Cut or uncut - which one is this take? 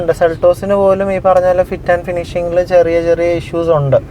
uncut